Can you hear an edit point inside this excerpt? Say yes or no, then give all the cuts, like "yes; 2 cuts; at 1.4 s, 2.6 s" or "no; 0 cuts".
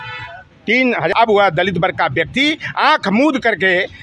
yes; 1 cut; at 1.1 s